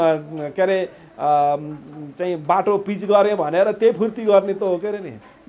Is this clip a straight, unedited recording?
yes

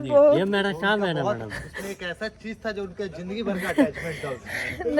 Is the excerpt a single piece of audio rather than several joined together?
yes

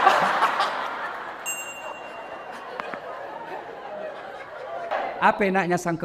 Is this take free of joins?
no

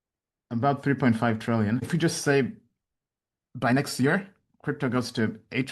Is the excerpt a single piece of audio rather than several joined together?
no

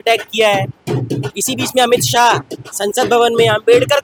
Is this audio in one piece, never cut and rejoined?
yes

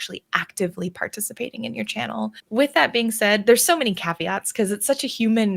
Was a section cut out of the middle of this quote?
yes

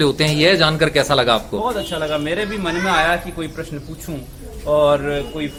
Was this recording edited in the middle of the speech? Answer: no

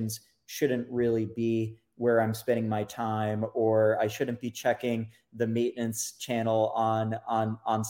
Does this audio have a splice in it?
no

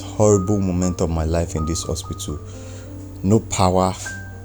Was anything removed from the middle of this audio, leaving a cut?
no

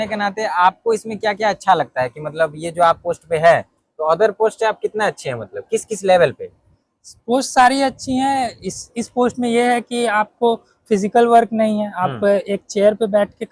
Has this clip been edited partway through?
no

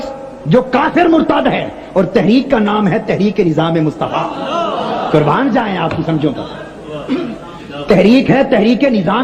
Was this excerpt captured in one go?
yes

